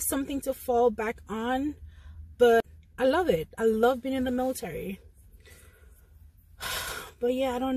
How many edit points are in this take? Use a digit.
1